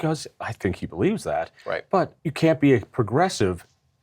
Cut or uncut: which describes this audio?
cut